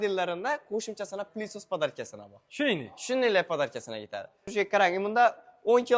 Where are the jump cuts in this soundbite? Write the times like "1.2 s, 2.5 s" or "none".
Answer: 4.4 s